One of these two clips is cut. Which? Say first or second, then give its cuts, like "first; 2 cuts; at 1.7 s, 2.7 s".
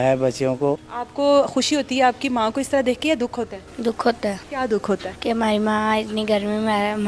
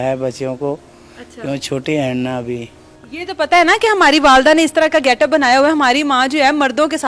first; 3 cuts; at 1.0 s, 4.4 s, 5.1 s